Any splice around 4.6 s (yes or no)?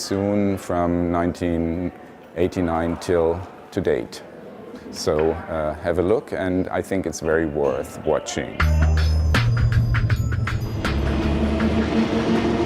yes